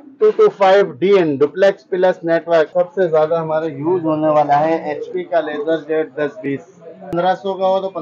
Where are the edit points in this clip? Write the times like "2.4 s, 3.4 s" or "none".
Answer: 2.7 s, 6.9 s